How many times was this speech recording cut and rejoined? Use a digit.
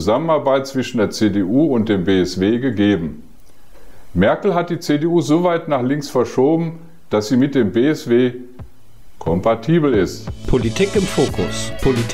1